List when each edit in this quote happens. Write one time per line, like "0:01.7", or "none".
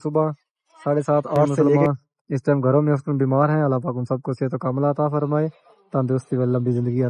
0:01.8

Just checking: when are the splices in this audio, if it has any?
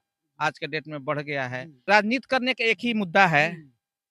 0:01.8

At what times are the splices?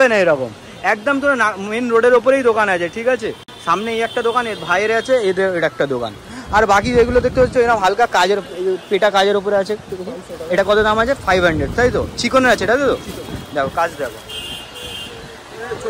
none

